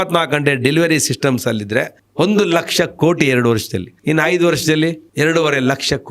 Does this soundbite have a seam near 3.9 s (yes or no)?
no